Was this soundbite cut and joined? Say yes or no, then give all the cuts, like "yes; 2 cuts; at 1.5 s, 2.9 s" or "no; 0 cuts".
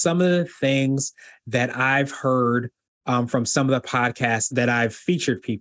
yes; 1 cut; at 4.5 s